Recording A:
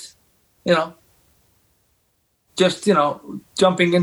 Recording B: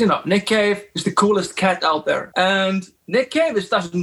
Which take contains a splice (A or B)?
B